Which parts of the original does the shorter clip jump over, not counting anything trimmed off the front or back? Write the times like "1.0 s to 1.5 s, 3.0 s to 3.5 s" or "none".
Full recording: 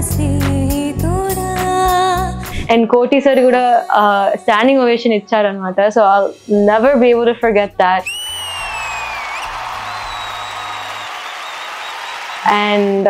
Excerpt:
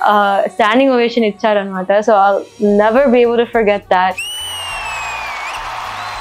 none